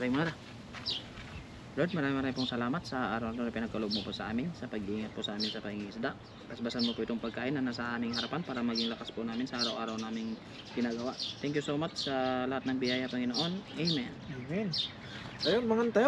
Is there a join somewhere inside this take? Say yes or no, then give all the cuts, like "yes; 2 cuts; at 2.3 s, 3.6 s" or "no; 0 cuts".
no; 0 cuts